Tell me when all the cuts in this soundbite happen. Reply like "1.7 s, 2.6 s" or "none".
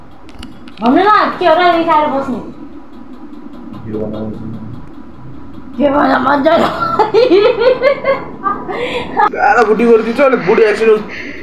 9.3 s

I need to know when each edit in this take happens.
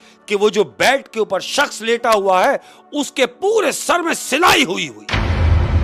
none

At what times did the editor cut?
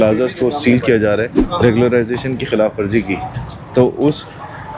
1.3 s

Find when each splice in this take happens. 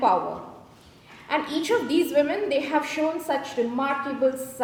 none

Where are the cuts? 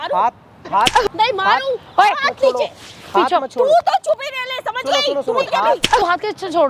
5.5 s

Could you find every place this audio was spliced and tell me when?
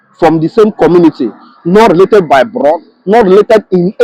none

